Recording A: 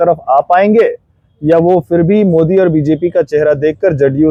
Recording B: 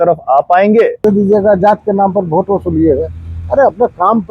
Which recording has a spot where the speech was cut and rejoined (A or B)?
B